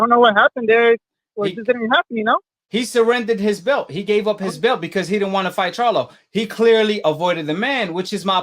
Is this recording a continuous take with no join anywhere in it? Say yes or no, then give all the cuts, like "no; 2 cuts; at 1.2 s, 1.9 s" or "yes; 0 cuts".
no; 1 cut; at 2.6 s